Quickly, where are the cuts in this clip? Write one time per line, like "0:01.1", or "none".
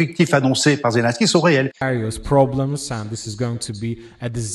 0:01.8